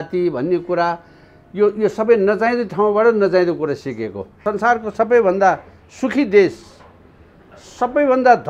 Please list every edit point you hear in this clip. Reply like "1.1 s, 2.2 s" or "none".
4.4 s